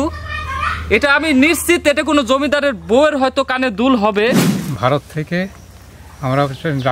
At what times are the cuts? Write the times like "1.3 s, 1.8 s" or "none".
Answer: 4.5 s